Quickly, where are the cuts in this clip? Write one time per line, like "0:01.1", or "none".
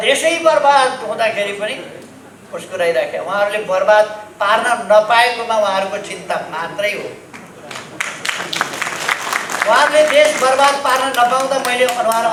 none